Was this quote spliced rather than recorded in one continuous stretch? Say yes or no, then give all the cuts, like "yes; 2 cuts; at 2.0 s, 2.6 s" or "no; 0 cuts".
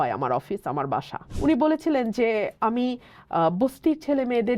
yes; 1 cut; at 1.2 s